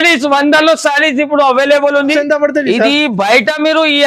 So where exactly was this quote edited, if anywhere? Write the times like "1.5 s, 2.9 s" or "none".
2.1 s